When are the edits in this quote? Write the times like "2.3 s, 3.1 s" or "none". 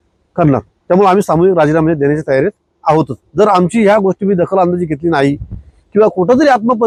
none